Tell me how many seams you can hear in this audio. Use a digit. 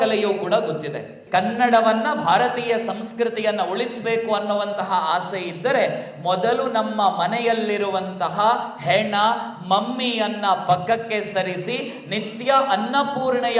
1